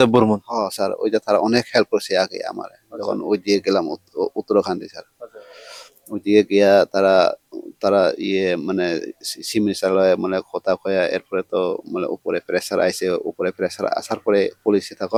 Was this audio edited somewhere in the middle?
no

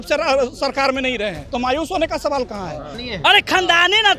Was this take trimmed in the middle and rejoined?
yes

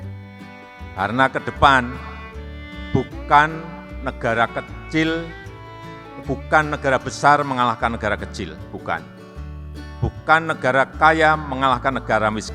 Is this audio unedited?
no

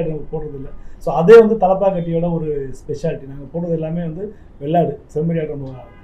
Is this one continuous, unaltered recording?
yes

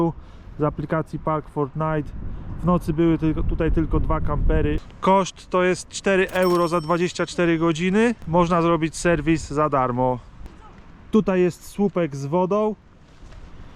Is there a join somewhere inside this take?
no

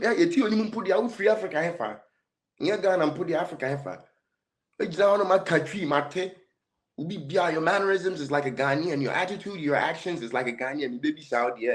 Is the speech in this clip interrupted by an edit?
no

